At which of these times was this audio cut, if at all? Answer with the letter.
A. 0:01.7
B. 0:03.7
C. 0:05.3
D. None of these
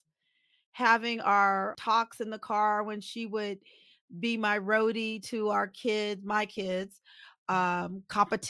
A